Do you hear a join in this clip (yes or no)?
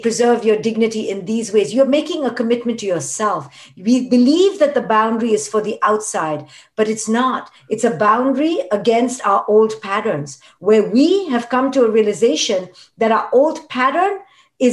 no